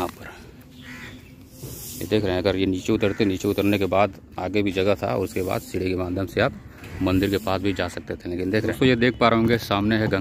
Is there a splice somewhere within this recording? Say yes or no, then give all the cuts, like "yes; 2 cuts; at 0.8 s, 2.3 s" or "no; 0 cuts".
yes; 1 cut; at 8.7 s